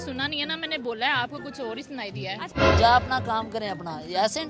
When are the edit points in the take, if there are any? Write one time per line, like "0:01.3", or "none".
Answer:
0:02.4